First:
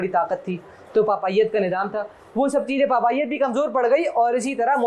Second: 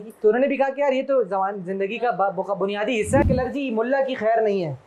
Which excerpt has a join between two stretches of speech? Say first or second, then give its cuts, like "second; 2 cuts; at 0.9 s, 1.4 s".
second; 1 cut; at 3.2 s